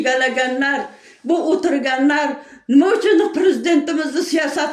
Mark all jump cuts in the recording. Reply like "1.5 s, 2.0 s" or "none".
none